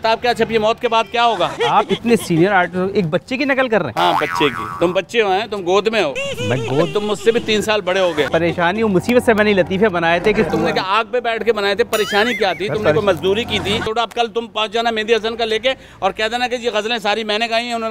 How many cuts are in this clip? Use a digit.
4